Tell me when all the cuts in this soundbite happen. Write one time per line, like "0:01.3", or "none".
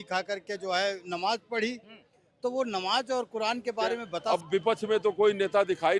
0:04.2